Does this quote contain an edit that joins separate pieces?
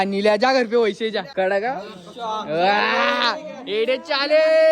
yes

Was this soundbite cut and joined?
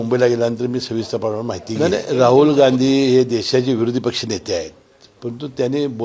yes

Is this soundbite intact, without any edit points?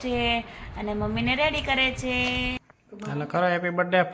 no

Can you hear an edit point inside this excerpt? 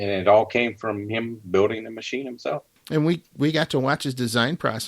yes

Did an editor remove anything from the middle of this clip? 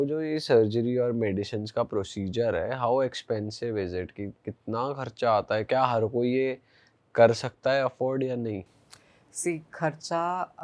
no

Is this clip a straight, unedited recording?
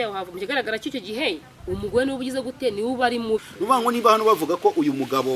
no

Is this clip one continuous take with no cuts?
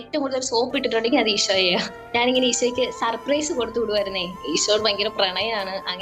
no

